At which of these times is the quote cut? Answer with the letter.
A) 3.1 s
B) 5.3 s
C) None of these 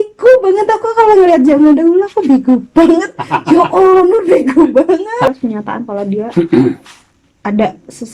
B